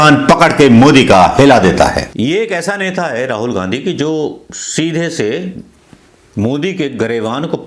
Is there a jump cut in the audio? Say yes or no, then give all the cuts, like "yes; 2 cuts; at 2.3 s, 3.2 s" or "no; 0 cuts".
yes; 1 cut; at 2.1 s